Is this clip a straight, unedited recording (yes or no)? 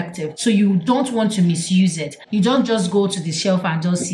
no